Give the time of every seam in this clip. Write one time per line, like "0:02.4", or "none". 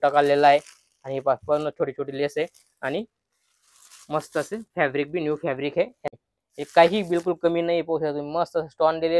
0:06.1